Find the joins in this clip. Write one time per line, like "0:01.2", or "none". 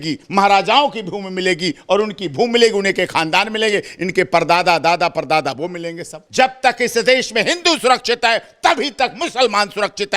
0:06.2